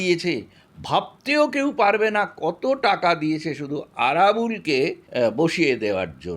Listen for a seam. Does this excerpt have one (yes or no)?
yes